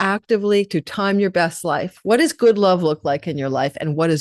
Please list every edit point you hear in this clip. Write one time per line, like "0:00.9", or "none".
0:01.9